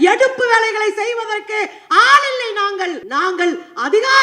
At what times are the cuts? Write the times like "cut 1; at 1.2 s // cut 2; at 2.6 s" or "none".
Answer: cut 1; at 3.0 s